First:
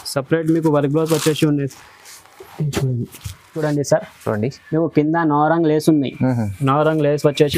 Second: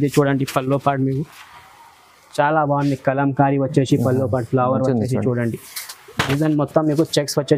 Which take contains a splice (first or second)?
first